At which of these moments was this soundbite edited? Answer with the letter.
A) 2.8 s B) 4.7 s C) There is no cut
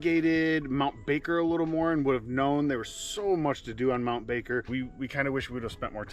B